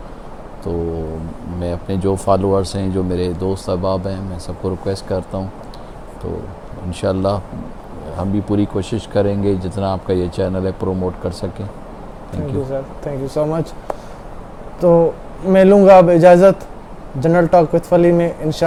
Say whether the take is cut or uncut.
uncut